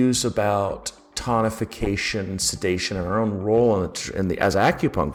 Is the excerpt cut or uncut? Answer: uncut